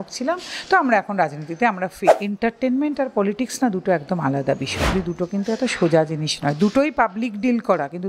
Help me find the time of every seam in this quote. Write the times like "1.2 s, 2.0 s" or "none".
2.2 s, 5.0 s

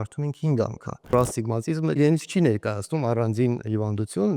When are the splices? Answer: 1.1 s

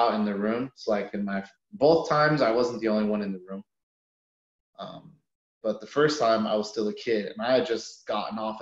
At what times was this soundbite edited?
none

